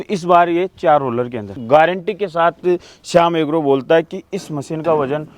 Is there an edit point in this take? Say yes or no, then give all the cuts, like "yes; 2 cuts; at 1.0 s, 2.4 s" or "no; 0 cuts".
yes; 1 cut; at 1.6 s